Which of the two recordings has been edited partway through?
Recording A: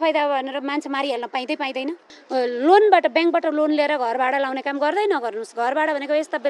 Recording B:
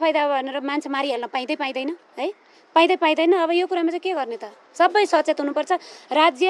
A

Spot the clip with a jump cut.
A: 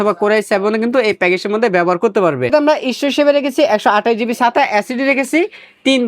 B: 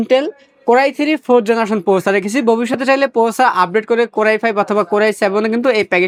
A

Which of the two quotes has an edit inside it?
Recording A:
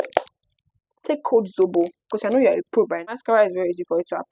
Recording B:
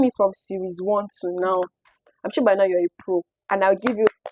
A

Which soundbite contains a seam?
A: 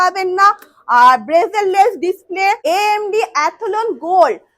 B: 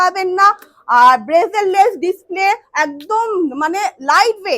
A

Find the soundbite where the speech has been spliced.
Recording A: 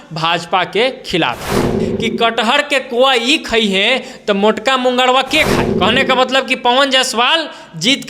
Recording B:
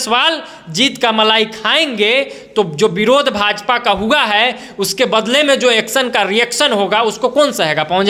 A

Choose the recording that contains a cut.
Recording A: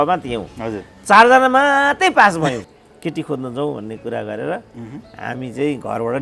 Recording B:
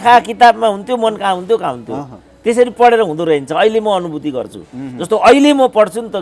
A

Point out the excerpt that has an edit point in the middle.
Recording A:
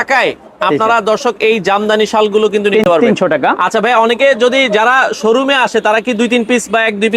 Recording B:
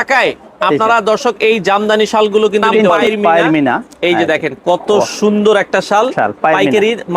B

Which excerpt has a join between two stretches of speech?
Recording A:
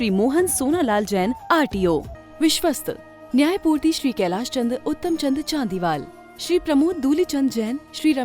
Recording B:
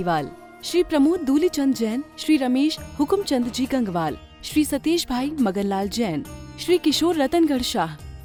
A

